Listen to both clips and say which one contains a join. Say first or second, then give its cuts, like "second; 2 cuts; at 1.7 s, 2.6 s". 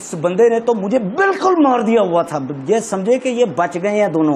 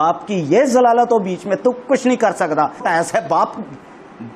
second; 1 cut; at 2.8 s